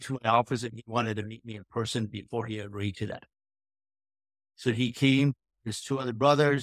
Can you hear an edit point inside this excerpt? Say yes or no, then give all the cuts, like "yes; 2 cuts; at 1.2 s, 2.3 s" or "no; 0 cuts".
no; 0 cuts